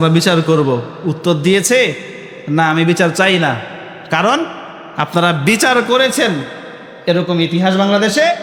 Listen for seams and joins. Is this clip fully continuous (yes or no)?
yes